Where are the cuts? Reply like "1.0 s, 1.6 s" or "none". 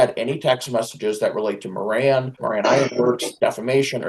2.3 s, 3.3 s